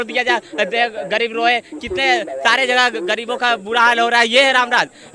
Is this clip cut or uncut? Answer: uncut